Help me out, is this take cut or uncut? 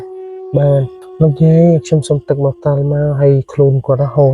cut